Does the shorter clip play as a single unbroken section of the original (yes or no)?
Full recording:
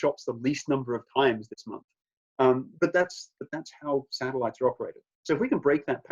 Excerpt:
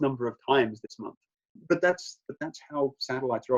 no